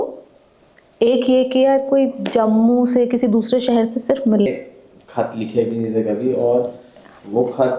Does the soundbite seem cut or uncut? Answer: cut